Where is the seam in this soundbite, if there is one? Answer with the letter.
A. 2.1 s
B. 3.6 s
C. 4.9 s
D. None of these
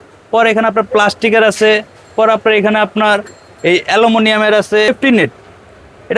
C